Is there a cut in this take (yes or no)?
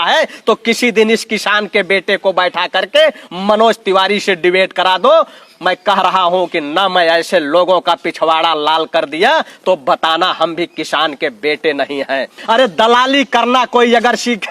yes